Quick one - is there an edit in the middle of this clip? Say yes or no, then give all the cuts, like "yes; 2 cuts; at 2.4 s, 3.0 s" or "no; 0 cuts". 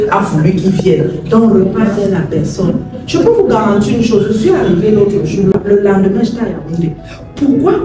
yes; 1 cut; at 5.5 s